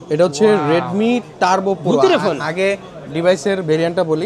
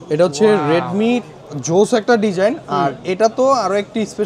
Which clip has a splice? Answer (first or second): second